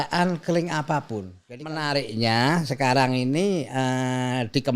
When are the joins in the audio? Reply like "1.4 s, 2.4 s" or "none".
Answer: 1.4 s